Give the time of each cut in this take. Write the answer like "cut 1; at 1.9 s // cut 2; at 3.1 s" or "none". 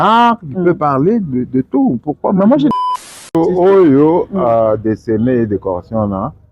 cut 1; at 2.7 s